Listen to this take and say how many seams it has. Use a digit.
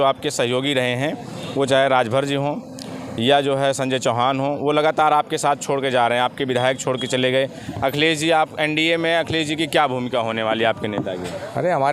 1